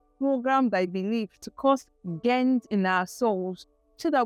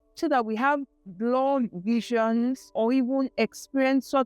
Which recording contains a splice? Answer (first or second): second